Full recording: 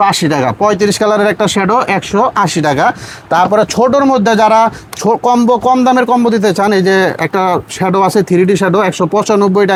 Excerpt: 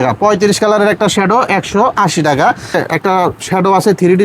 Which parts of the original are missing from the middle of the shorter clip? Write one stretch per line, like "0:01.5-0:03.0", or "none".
0:03.2-0:07.1